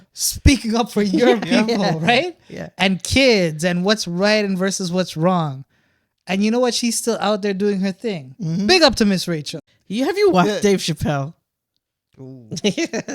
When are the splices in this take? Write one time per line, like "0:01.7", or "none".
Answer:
0:09.5

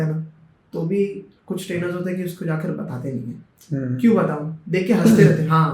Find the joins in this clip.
none

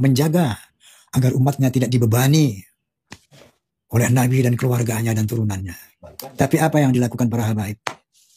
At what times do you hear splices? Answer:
none

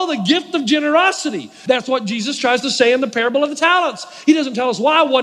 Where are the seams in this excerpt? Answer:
0:01.5

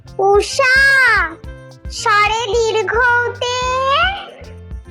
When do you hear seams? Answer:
none

